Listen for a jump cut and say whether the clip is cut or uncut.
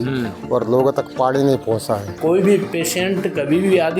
cut